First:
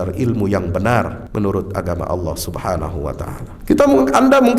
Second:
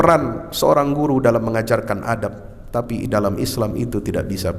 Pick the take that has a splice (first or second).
first